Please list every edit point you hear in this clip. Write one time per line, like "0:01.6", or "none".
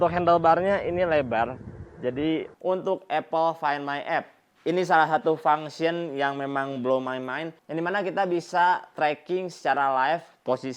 0:02.5
0:07.6